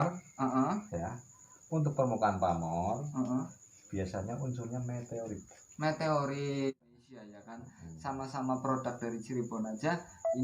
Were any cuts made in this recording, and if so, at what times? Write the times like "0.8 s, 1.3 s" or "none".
6.7 s